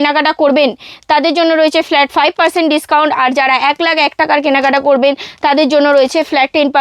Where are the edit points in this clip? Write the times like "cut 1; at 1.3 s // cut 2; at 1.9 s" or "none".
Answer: none